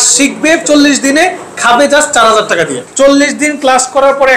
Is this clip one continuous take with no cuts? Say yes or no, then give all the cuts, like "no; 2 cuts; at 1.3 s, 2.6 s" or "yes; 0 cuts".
no; 1 cut; at 2.8 s